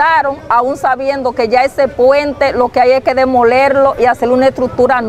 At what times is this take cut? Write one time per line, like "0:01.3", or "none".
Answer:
none